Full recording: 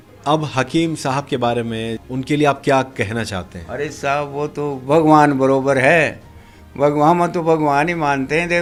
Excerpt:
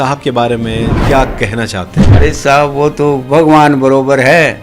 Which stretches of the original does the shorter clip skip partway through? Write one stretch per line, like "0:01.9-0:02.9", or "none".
0:02.1-0:02.6